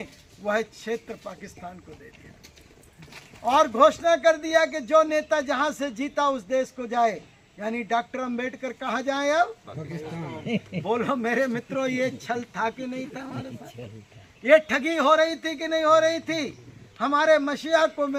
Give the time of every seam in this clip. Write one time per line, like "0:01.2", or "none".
none